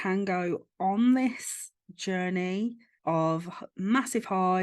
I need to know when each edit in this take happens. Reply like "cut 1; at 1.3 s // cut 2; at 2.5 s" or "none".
cut 1; at 2.9 s